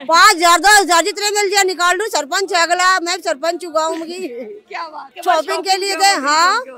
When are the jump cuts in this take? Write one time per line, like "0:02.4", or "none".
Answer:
0:05.0